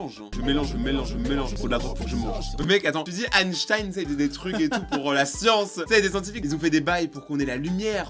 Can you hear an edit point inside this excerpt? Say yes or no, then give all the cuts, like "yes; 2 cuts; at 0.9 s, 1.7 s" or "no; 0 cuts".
no; 0 cuts